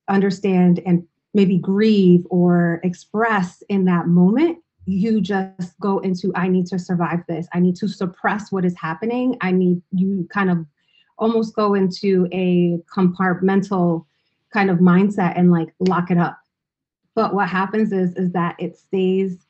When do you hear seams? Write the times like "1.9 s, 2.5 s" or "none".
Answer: 1.1 s